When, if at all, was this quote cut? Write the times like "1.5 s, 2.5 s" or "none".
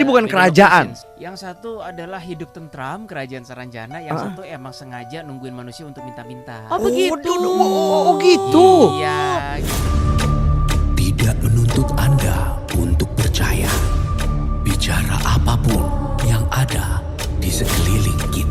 1.0 s, 9.6 s